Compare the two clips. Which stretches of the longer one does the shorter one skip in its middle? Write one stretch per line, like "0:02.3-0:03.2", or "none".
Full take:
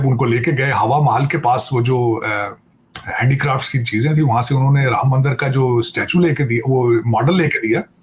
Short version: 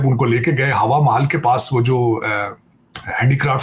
none

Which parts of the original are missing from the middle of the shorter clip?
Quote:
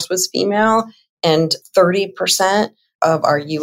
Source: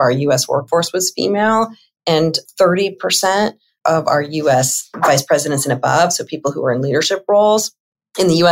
none

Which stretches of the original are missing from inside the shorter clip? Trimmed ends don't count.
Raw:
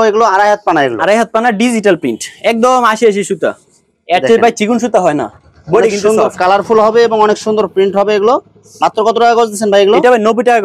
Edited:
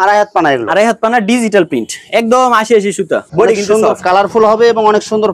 0:03.6-0:05.6

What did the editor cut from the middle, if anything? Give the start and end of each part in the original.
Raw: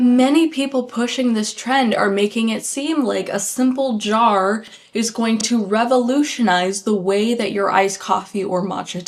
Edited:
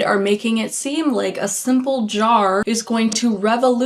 0:04.6-0:04.9

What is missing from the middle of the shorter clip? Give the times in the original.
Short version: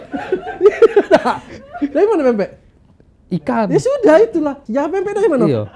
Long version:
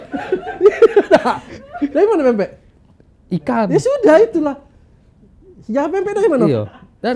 0:04.6-0:05.6

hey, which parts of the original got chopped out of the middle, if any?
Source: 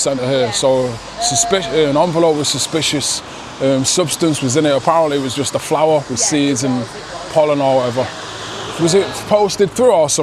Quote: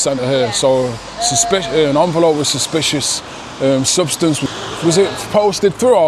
0:04.4-0:08.4

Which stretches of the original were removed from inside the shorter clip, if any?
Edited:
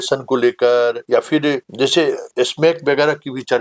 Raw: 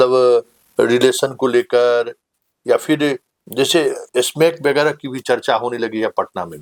0:02.6-0:03.2

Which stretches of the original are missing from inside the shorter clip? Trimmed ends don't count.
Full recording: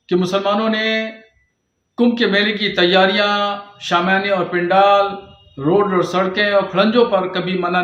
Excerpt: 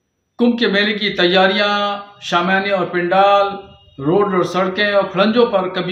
none

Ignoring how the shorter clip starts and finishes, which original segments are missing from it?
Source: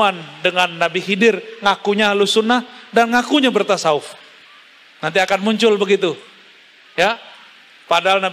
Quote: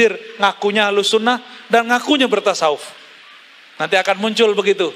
none

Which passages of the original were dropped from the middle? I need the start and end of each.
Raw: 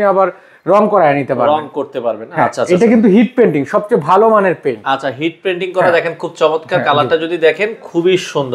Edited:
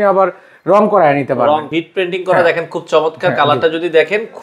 0:01.7-0:05.2

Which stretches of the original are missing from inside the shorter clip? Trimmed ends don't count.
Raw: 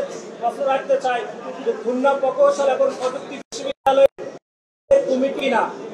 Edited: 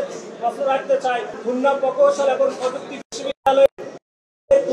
0:01.4-0:01.8

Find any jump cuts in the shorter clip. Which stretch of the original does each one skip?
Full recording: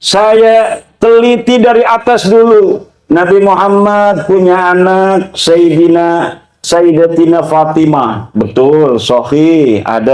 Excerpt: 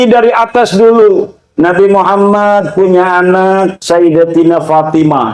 0:05.3-0:06.6

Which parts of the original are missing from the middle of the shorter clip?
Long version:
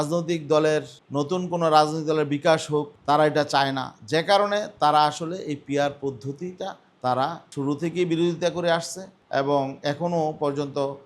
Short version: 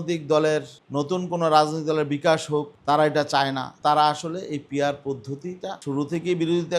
0:03.9-0:04.7
0:06.7-0:07.5

